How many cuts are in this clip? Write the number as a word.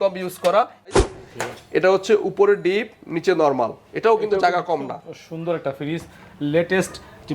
one